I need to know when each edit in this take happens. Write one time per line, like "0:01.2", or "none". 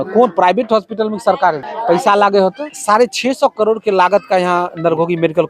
0:01.7
0:02.7